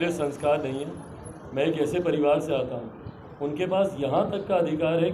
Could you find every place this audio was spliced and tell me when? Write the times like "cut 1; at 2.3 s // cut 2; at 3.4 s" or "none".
none

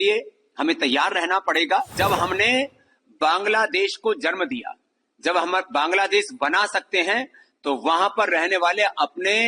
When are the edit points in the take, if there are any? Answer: cut 1; at 2.0 s

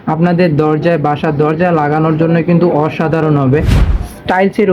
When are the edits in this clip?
cut 1; at 3.8 s

